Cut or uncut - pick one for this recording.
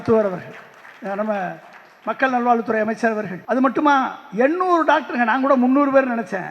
cut